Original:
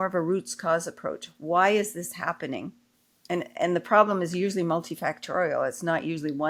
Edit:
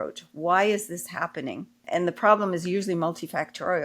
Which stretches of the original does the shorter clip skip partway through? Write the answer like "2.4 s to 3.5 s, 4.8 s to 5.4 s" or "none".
2.9 s to 3.5 s